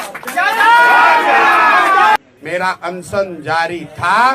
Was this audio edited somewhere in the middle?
yes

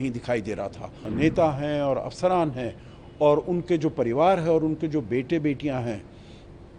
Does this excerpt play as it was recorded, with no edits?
no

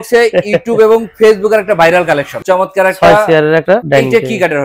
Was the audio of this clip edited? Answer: yes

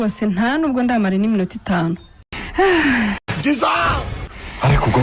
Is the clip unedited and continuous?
no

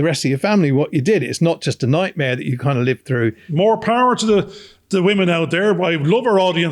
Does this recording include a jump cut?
yes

